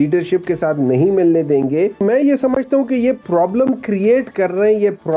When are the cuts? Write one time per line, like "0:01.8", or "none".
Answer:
0:02.0